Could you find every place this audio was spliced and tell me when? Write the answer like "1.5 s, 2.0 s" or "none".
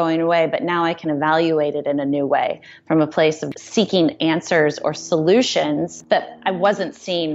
3.4 s, 5.9 s